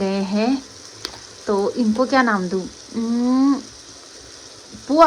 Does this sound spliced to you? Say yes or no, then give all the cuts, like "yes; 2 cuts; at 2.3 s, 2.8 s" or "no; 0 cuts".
no; 0 cuts